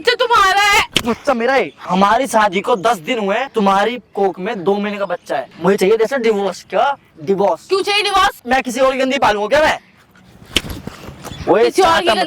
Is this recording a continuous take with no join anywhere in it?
no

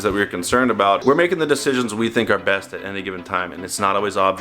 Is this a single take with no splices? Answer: no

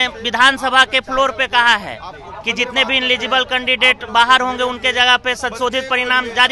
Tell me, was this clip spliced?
no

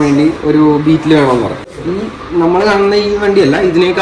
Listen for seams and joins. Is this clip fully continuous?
no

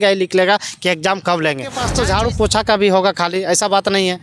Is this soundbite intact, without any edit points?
no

